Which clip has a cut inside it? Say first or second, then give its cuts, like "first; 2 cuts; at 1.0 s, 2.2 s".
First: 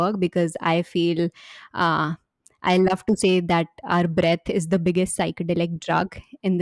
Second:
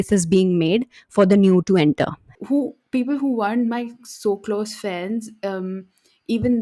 second; 1 cut; at 2.2 s